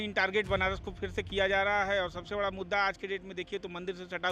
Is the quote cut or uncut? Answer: uncut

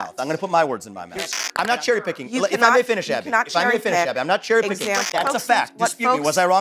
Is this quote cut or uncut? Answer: cut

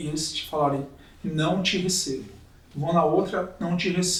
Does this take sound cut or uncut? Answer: uncut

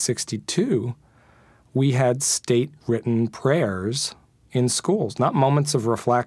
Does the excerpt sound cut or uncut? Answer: uncut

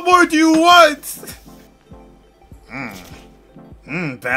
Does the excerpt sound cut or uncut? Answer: uncut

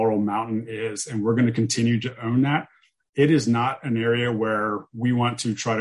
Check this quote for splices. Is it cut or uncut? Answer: uncut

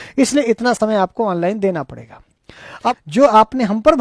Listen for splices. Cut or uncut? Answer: cut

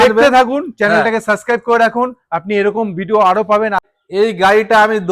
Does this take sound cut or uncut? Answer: cut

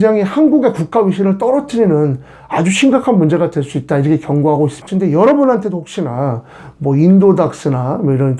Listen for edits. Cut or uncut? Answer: cut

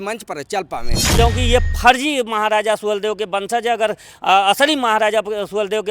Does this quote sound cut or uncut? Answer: cut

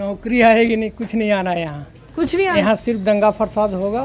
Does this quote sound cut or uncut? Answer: uncut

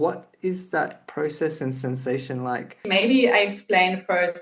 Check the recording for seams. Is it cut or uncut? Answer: cut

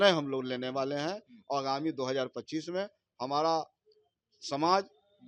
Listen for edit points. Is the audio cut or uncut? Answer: uncut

